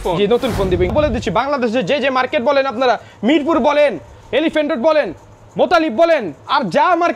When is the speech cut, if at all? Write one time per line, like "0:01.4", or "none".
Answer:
0:00.9